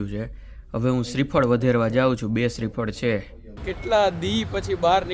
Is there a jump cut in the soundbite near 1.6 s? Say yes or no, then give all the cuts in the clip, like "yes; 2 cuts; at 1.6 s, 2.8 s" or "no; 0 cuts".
no; 1 cut; at 3.7 s